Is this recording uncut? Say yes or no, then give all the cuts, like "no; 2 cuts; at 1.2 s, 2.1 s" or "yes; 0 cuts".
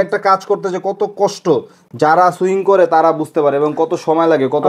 yes; 0 cuts